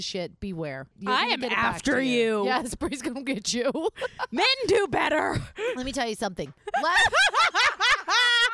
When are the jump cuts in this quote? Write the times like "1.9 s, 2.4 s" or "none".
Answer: 1.0 s